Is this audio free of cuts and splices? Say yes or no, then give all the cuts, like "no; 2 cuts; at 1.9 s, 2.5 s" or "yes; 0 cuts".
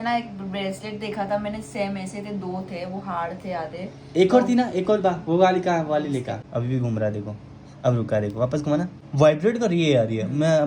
no; 2 cuts; at 6.4 s, 9.0 s